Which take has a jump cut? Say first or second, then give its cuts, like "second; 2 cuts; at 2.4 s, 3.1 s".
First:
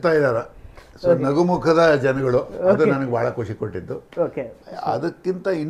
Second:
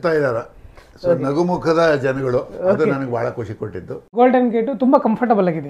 second; 1 cut; at 4.1 s